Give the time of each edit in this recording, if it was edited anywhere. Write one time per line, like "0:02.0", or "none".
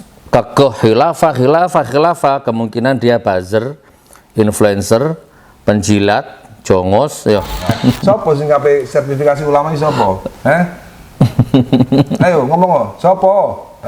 0:07.7